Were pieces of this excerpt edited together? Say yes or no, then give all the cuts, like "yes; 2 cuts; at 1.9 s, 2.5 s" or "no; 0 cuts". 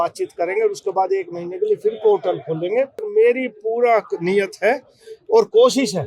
yes; 1 cut; at 3.0 s